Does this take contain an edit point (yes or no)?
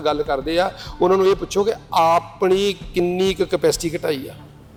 no